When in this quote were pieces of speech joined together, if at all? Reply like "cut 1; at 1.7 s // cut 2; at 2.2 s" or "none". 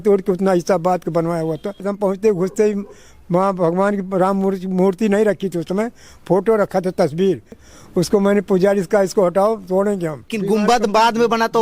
cut 1; at 1.9 s // cut 2; at 7.7 s // cut 3; at 10.4 s